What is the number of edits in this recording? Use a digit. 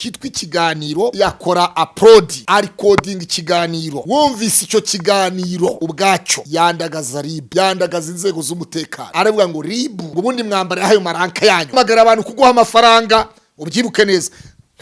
8